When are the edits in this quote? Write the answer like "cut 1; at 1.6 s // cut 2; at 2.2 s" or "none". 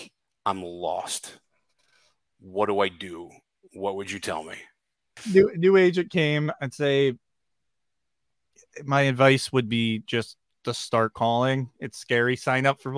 none